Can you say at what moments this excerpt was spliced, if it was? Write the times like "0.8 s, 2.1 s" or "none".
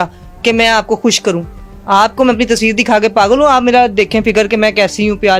none